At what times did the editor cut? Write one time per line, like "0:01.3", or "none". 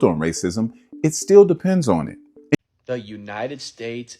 0:02.5